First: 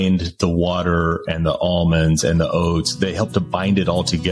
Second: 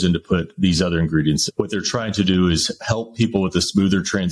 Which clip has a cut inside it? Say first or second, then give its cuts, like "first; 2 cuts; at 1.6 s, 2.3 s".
second; 1 cut; at 1.4 s